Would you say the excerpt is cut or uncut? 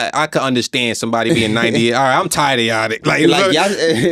uncut